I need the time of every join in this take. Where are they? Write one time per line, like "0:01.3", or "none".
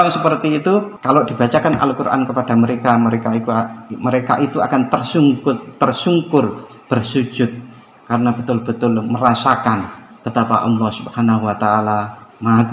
0:00.9